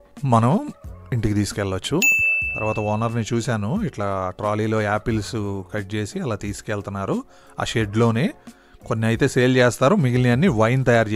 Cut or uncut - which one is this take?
cut